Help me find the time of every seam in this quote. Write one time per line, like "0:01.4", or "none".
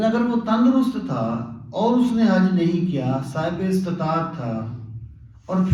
none

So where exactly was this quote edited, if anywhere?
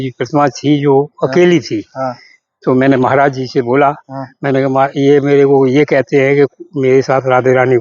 none

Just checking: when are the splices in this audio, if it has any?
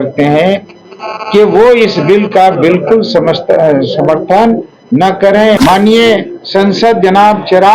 0:05.6

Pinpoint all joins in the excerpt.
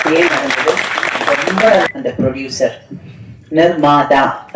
0:01.7

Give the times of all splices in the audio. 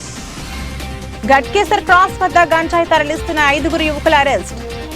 none

